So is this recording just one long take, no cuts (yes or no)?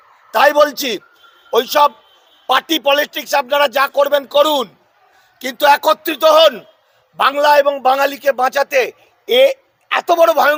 yes